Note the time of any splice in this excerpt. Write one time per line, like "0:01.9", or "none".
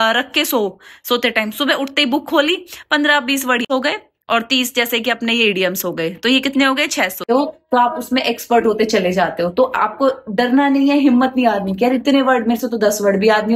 0:03.7
0:07.2